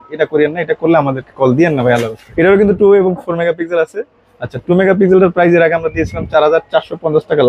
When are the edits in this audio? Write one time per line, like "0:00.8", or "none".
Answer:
0:02.2